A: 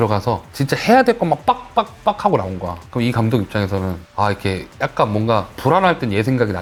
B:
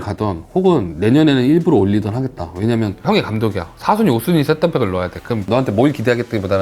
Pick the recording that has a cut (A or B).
B